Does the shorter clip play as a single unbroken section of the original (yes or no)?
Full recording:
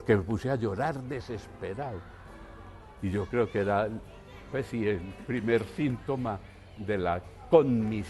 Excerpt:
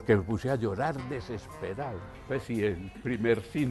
no